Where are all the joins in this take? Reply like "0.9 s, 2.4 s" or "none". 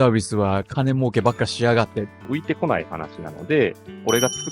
2.2 s